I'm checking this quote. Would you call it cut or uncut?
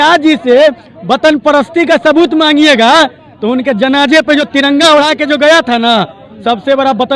uncut